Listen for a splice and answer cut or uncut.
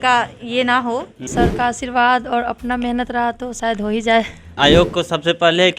cut